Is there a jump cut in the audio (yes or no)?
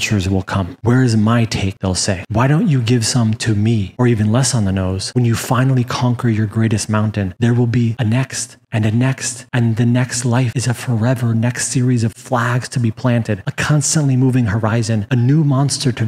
yes